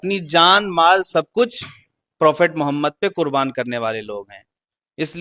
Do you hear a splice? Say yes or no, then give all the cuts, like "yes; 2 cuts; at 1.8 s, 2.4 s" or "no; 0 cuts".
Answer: no; 0 cuts